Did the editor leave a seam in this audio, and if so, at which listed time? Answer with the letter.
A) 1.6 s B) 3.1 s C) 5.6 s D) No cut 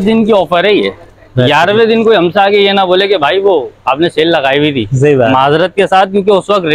D